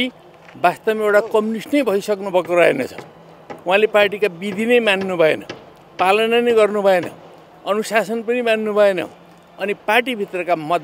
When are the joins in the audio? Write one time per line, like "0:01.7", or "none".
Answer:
none